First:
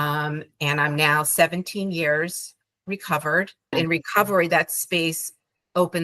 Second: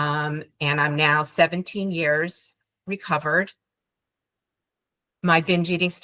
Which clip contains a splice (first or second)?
first